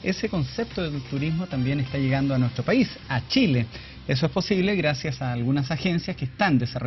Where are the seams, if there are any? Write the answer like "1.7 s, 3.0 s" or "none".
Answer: 2.8 s